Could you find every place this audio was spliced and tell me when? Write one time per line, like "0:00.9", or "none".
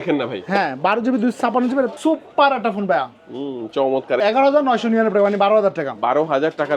0:01.9
0:04.2